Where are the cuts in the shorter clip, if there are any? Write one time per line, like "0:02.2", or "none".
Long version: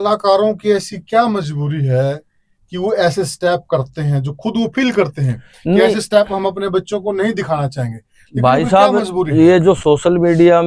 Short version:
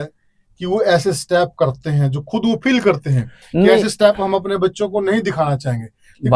none